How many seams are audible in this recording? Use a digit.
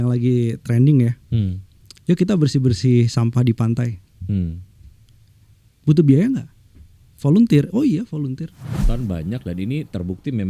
1